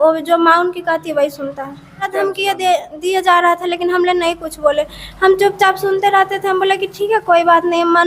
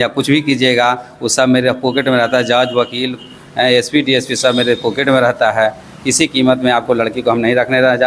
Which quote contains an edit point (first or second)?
first